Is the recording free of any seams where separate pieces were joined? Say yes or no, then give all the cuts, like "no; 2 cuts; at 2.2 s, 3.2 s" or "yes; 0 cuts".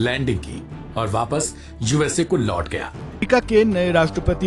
no; 1 cut; at 3.2 s